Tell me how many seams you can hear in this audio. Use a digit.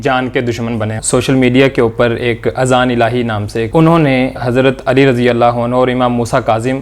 3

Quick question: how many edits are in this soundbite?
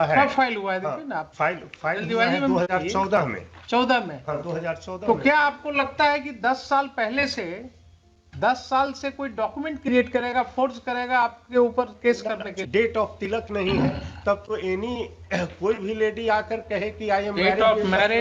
1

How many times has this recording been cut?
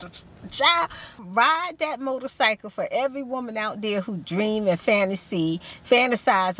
1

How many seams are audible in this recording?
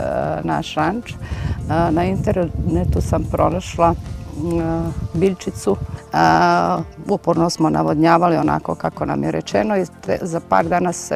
1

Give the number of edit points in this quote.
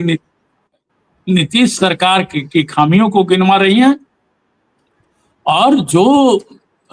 0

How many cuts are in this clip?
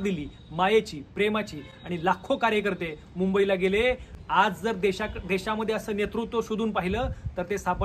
0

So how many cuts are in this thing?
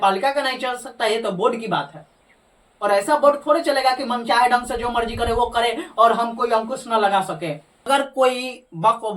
1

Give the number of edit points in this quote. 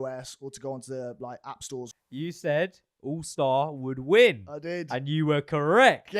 1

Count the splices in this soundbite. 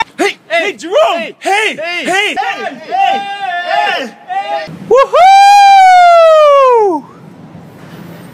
1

